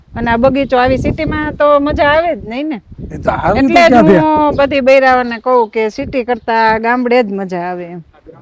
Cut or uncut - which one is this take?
uncut